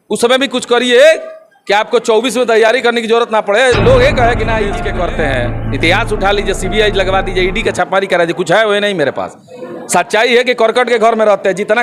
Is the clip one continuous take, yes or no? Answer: no